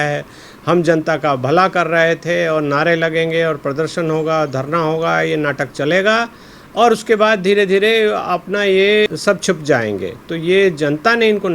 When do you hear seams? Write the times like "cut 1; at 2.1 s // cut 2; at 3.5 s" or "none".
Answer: cut 1; at 9.1 s